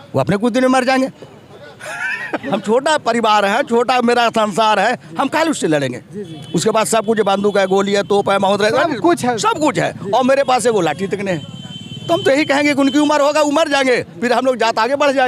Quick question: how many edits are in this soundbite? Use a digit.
0